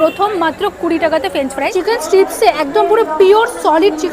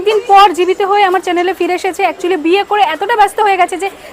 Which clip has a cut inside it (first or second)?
first